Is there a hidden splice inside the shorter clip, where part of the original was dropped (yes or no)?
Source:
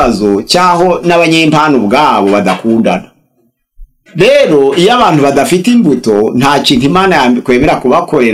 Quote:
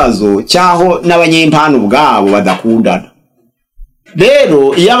no